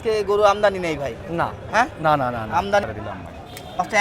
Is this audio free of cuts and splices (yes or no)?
no